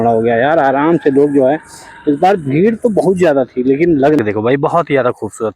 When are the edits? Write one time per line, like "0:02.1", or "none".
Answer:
0:04.2